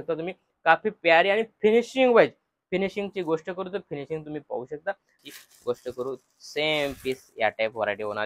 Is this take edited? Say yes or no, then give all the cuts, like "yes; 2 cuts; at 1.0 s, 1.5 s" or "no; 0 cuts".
yes; 1 cut; at 5.2 s